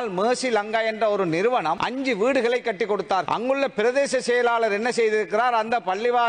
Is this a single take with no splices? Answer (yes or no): no